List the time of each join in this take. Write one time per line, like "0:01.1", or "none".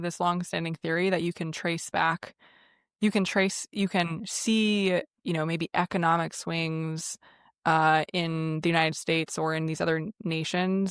none

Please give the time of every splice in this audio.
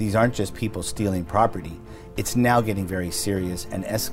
none

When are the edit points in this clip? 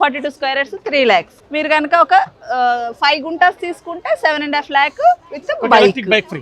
none

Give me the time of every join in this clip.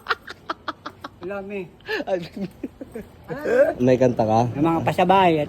0:03.8

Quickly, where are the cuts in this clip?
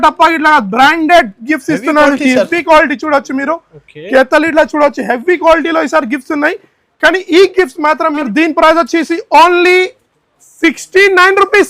0:08.3

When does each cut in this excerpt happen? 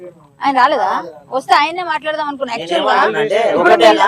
none

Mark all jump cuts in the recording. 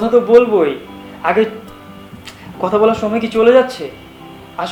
none

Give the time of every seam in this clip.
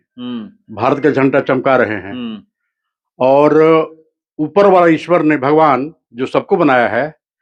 none

